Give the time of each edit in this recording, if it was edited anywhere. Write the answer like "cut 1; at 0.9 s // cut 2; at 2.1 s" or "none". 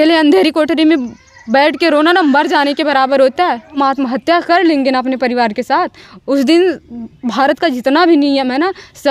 cut 1; at 3.8 s